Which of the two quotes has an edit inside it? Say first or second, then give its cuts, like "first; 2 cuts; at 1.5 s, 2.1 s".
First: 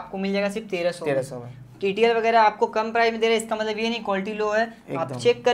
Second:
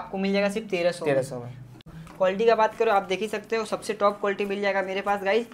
second; 1 cut; at 1.7 s